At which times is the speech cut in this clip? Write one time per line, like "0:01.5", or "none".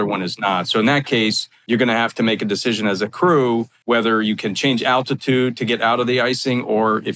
0:01.5
0:03.7